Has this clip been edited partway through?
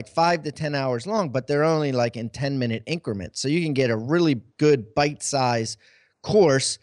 no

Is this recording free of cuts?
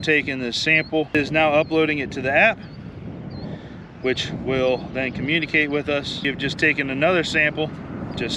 no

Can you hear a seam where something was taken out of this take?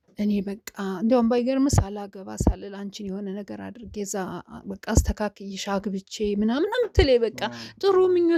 no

